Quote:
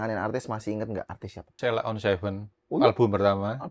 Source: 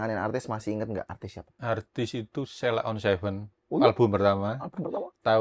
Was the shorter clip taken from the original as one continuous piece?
no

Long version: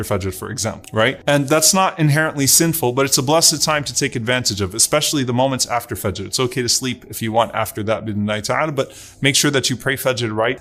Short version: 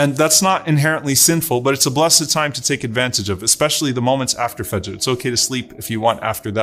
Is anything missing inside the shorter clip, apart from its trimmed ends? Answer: no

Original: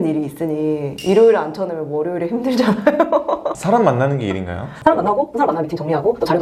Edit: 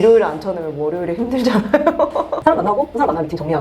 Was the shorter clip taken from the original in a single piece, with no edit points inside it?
no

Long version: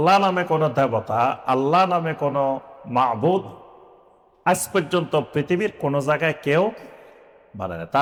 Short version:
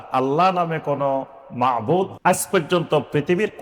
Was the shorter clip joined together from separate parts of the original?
yes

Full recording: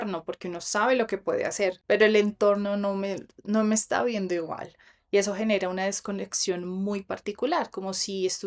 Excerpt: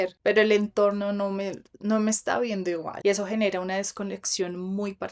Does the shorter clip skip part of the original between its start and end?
yes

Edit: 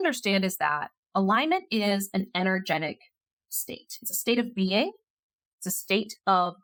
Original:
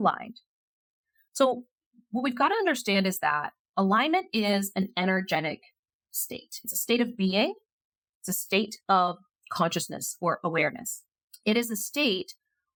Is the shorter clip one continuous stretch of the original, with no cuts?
yes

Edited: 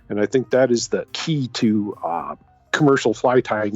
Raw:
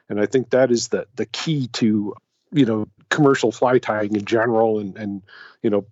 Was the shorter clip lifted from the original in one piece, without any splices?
no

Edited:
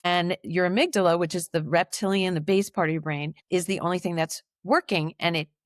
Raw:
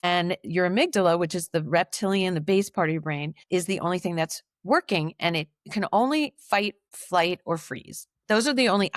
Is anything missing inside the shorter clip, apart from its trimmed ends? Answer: no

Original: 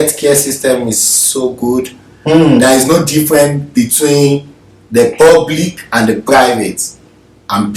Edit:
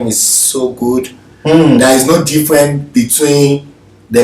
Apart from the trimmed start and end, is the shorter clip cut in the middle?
no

